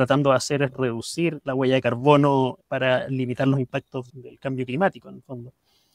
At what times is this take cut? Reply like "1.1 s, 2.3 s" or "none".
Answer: 2.6 s, 4.1 s